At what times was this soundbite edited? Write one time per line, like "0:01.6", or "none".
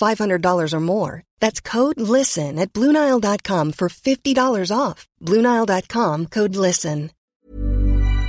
0:07.2